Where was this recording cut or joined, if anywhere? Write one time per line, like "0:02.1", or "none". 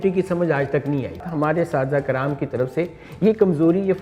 0:01.3